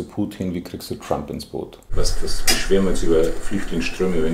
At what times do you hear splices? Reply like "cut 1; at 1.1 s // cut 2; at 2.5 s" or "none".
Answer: cut 1; at 1.9 s